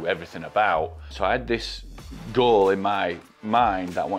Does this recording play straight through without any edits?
no; 1 cut; at 1.1 s

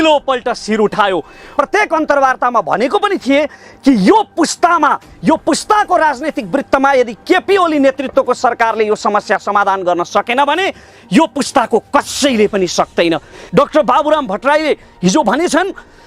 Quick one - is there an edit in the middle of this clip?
yes; 2 cuts; at 1.5 s, 13.4 s

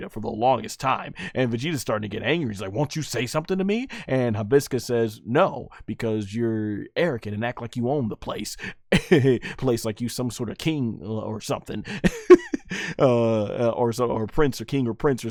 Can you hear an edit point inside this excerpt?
no; 0 cuts

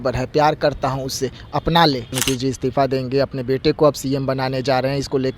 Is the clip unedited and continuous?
no; 1 cut; at 2.1 s

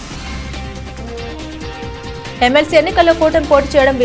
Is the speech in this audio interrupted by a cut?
yes; 1 cut; at 1.7 s

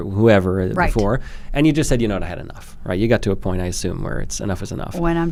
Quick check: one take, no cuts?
yes; 0 cuts

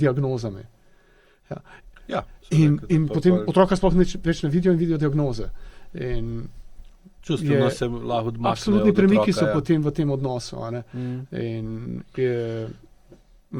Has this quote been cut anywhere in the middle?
no; 0 cuts

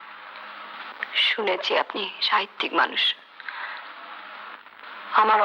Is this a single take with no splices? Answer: yes; 0 cuts

